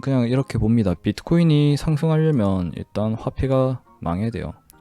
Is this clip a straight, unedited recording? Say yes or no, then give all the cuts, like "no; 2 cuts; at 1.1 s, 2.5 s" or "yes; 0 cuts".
yes; 0 cuts